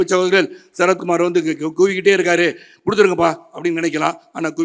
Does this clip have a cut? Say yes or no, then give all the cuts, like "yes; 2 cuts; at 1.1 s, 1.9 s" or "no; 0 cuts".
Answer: no; 0 cuts